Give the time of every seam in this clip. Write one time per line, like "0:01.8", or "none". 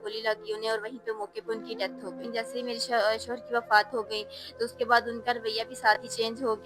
0:02.2